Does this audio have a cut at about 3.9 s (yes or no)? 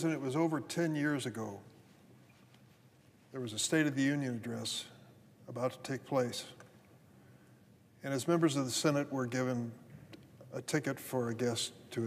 yes